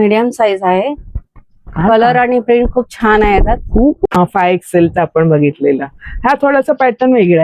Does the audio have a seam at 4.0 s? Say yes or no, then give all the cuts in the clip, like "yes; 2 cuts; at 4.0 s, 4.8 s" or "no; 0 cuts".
yes; 1 cut; at 4.0 s